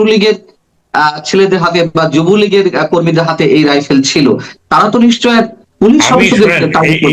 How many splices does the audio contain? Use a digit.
1